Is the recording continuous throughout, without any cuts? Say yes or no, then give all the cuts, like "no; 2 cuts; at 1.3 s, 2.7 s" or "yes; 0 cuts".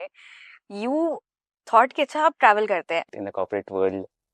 no; 1 cut; at 3.1 s